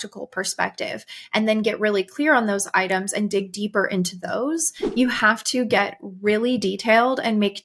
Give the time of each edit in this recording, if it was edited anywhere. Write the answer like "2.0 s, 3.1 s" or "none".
4.8 s